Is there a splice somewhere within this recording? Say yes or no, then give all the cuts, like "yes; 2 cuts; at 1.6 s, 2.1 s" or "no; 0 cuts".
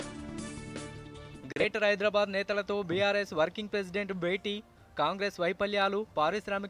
yes; 1 cut; at 1.6 s